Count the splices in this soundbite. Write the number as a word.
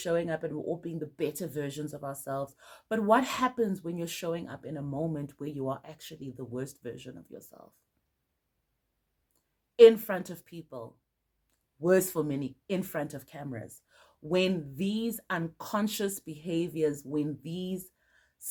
zero